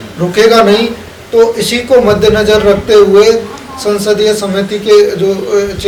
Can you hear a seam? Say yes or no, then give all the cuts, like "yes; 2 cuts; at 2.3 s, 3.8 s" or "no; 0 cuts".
no; 0 cuts